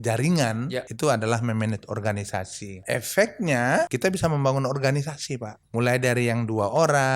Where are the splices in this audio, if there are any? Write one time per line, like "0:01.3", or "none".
0:00.9
0:02.8
0:03.9
0:05.6